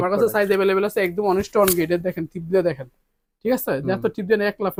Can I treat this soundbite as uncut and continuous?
yes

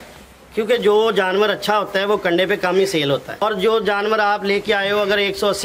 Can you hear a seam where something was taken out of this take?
yes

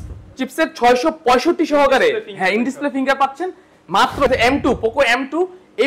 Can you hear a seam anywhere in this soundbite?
yes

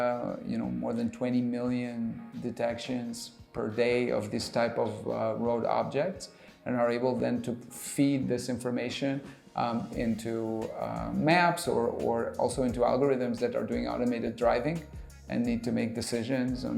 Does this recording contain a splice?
no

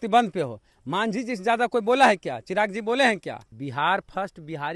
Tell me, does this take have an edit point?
yes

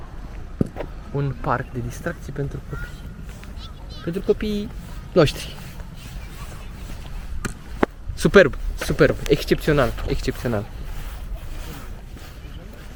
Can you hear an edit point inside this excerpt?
no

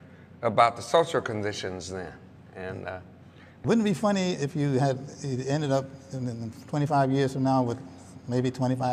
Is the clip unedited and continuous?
yes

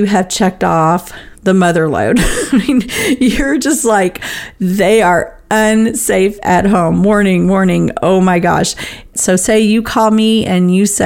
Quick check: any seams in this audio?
yes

